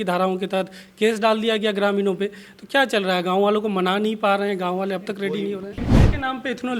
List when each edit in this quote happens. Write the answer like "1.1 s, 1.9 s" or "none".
5.8 s